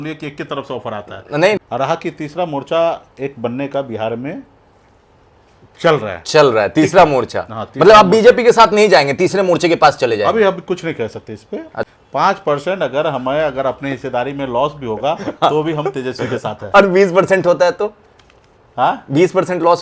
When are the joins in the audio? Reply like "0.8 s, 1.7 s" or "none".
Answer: 1.6 s, 11.9 s